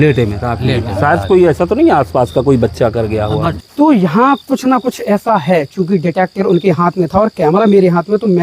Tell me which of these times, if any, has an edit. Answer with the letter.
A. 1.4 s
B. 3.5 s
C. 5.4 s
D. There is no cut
B